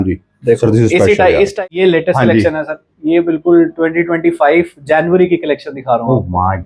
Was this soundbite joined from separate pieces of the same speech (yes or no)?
yes